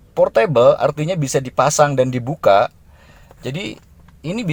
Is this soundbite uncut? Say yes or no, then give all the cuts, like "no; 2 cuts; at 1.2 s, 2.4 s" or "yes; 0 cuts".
yes; 0 cuts